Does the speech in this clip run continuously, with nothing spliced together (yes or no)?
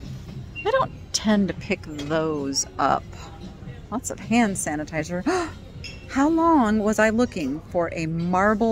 yes